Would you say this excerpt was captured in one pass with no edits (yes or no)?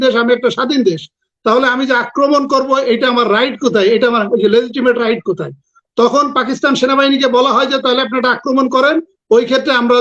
yes